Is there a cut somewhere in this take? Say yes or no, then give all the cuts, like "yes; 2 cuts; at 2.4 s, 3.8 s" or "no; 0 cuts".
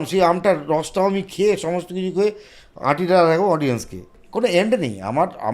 yes; 1 cut; at 4.2 s